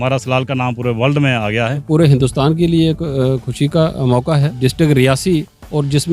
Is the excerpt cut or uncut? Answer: cut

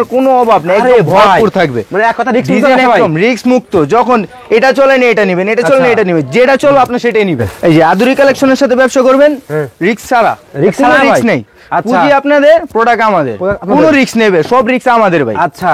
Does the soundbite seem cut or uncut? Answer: uncut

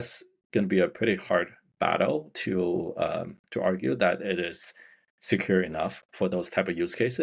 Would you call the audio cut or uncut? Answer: uncut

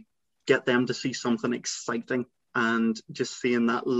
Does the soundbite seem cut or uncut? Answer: cut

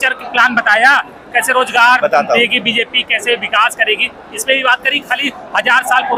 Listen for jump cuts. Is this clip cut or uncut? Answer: uncut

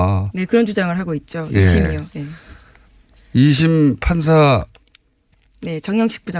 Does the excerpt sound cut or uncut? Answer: uncut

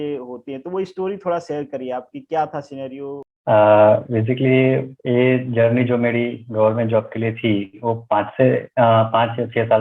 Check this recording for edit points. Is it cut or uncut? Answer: uncut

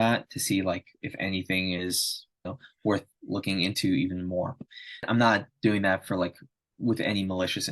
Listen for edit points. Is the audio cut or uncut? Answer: cut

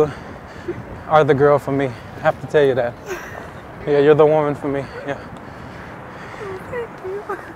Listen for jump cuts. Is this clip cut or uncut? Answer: uncut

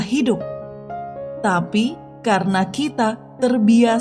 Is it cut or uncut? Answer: uncut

